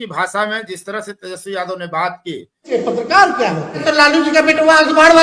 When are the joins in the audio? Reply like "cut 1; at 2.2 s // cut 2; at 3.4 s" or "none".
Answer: cut 1; at 2.7 s // cut 2; at 3.8 s